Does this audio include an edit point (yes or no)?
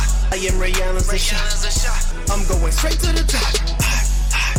no